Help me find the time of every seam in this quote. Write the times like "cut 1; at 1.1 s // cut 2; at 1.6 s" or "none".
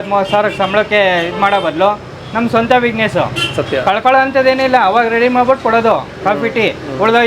none